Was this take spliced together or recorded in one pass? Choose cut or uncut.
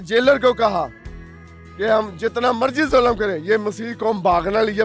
uncut